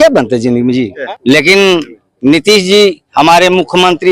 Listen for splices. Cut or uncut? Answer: cut